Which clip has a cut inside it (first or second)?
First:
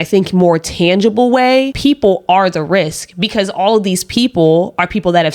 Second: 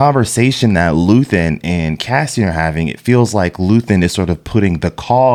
first